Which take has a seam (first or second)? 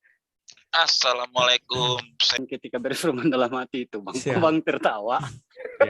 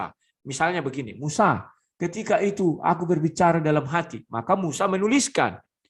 first